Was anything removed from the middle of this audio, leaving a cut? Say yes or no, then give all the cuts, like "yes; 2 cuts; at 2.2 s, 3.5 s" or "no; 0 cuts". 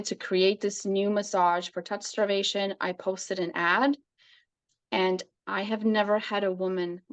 no; 0 cuts